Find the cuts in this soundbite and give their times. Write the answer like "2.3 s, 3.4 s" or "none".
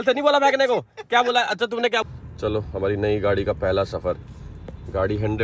2.0 s